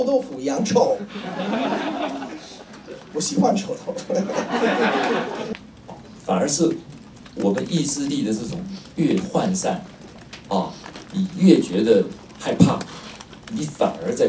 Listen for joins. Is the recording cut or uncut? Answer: cut